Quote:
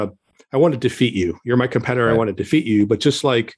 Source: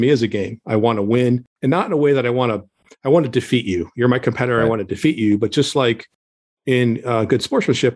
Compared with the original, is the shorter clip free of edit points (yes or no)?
yes